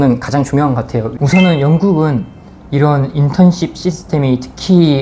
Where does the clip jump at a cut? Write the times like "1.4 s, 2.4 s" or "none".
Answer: 1.1 s